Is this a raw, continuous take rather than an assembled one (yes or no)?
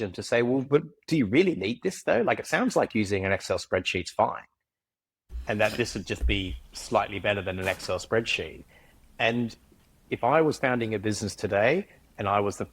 no